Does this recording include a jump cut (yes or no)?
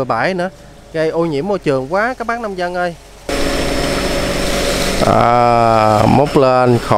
yes